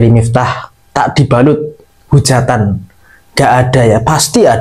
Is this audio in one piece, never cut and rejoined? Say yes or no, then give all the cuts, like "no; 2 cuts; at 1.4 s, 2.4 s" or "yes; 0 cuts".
yes; 0 cuts